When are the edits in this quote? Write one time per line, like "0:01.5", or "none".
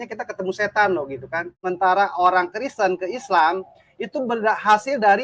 0:01.6